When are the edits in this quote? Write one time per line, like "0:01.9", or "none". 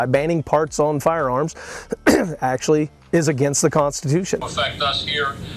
none

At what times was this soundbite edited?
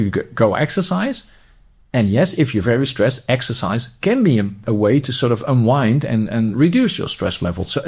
0:04.6

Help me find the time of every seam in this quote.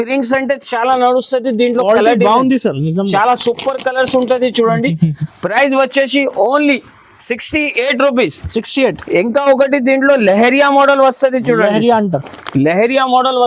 none

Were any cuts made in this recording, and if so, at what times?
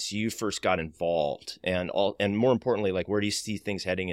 none

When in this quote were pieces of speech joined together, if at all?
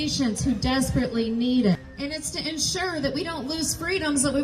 0:01.9

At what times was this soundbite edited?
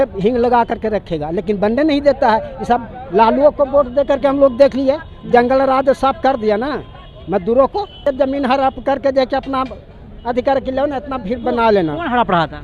0:02.9
0:08.0

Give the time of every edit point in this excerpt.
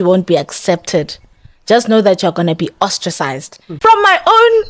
0:03.8

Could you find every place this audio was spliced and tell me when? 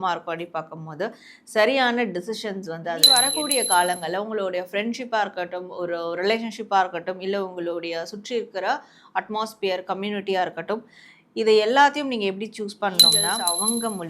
0:03.0
0:13.3

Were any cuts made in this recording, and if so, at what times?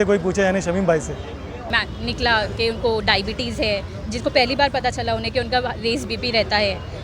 0:01.7

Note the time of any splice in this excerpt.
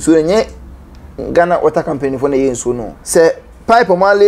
0:02.9

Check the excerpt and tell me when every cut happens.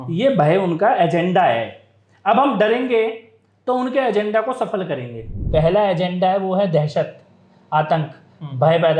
0:05.4

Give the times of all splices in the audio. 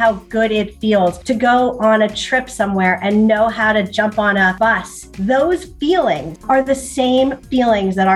0:01.2
0:04.7
0:06.4

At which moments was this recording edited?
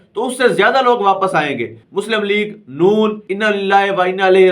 0:01.8
0:03.2

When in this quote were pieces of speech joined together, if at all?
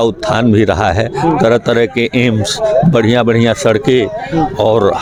none

